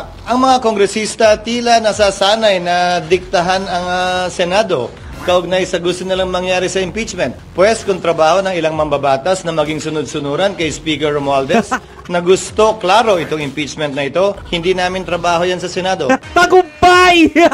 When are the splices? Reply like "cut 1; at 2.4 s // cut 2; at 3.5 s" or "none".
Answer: cut 1; at 7.3 s // cut 2; at 14.5 s // cut 3; at 16.2 s